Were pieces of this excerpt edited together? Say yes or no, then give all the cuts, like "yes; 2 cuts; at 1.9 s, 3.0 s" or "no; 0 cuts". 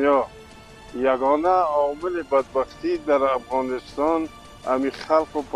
no; 0 cuts